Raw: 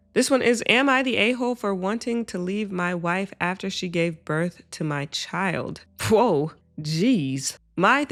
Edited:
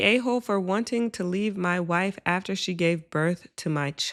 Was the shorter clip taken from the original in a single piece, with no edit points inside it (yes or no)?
yes